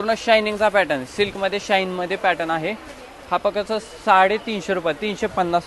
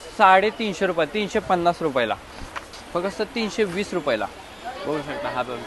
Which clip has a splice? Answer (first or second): second